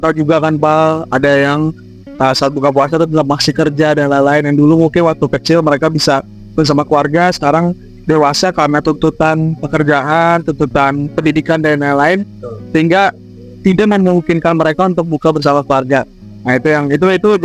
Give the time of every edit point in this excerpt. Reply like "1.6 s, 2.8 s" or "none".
none

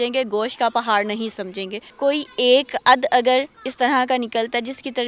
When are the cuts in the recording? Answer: 1.8 s

